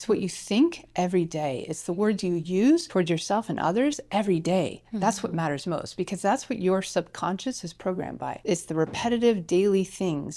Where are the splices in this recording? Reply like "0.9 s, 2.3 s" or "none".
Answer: 2.9 s, 8.4 s